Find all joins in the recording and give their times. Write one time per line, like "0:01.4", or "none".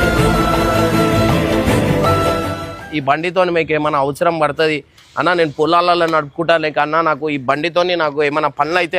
0:02.9